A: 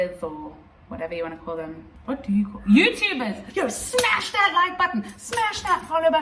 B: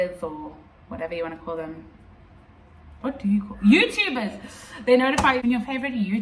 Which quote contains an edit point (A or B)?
A